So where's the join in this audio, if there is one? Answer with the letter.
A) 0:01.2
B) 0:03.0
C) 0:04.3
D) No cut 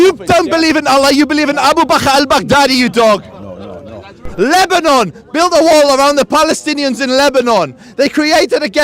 C